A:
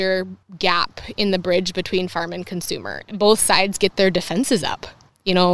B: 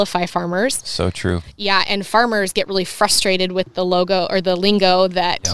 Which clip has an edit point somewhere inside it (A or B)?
A